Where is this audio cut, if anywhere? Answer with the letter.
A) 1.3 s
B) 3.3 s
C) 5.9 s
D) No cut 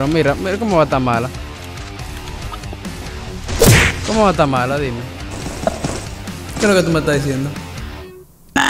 A